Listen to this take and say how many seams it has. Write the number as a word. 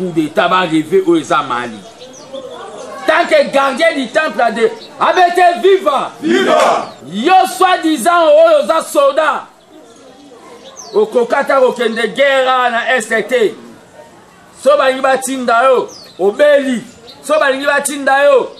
one